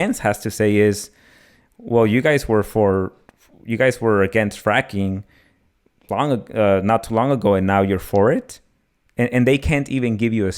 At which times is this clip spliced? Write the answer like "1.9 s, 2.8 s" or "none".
none